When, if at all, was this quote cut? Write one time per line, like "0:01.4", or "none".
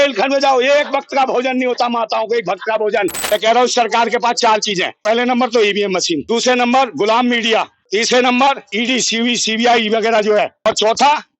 0:03.2
0:05.0
0:06.2
0:07.8
0:08.7
0:10.6

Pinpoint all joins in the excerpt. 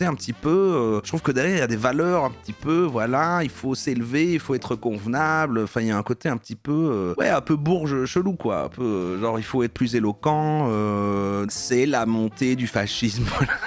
0:11.5

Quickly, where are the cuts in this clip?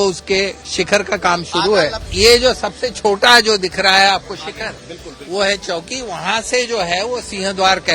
0:02.1

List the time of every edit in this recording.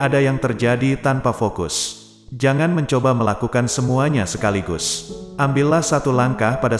none

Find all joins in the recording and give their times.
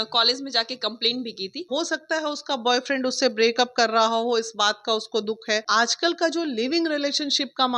0:01.7
0:05.6

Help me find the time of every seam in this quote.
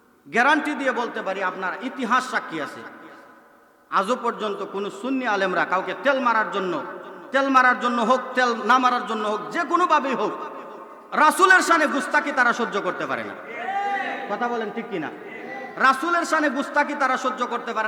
none

